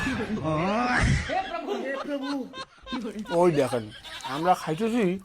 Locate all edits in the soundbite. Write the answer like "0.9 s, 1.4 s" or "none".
1.0 s